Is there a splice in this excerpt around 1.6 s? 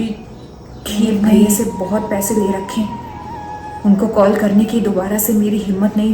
yes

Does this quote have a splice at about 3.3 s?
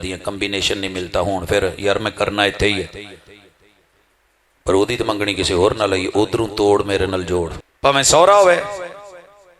no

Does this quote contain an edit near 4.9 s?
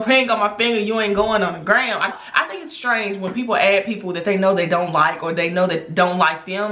no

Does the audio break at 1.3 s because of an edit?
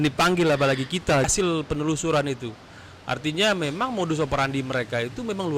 yes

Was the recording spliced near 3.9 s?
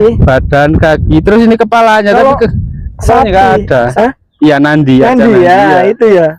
yes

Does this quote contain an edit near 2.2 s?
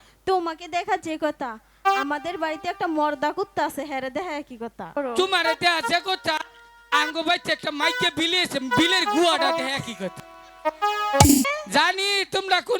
no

